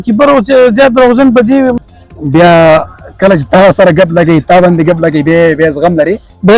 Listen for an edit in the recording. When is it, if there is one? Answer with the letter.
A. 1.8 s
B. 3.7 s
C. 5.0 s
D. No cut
A